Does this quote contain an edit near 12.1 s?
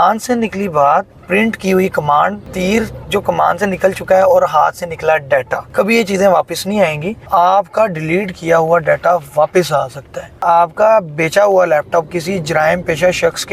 no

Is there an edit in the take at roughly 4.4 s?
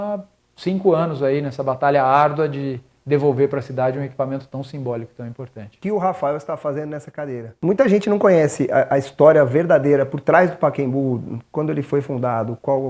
no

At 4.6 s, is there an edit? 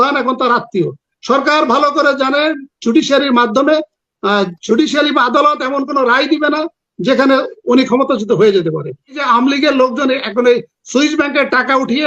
no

